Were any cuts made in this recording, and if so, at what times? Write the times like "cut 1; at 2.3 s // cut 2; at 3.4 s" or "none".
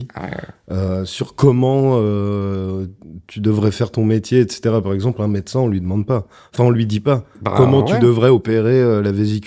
none

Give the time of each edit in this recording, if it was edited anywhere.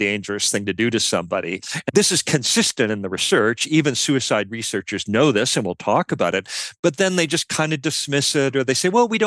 cut 1; at 1.7 s

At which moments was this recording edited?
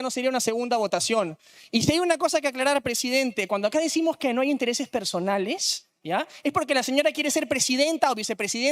none

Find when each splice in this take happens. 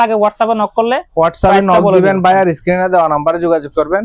none

